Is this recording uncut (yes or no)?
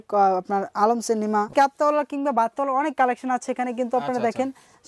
no